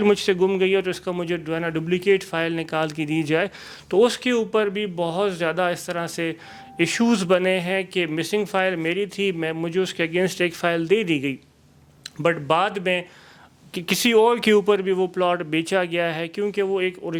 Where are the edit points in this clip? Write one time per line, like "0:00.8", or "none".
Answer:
none